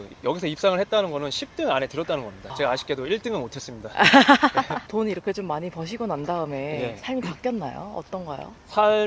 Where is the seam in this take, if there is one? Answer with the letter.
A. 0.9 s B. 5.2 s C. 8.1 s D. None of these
D